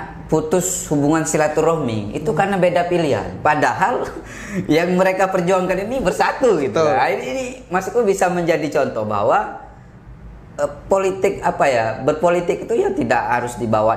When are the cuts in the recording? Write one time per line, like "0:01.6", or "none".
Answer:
none